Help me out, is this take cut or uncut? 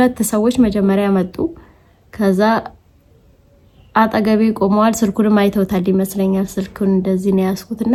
uncut